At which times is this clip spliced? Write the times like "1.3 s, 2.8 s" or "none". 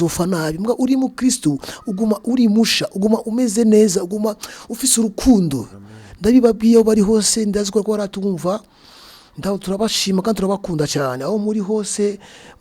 none